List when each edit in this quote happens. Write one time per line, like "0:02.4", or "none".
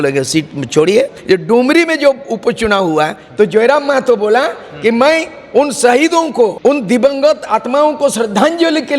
0:01.2
0:06.6